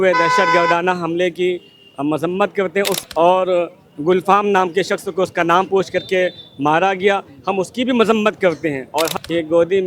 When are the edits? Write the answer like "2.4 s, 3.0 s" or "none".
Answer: 2.9 s, 9.1 s